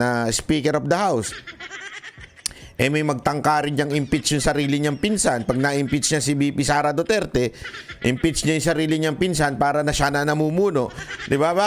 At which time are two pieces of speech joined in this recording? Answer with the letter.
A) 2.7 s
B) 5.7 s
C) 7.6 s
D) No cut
D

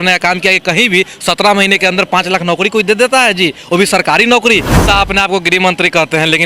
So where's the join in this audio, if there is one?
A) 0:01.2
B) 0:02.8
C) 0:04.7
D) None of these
C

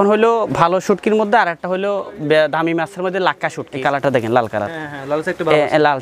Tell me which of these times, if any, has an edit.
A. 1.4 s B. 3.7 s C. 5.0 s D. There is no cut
B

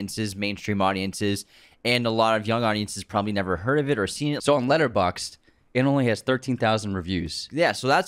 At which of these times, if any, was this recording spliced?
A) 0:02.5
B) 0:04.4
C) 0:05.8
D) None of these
B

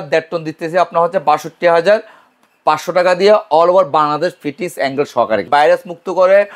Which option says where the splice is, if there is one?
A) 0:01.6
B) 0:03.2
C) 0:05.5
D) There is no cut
C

